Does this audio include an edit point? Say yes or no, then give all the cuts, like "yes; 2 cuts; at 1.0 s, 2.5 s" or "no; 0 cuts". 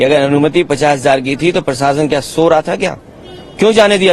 no; 0 cuts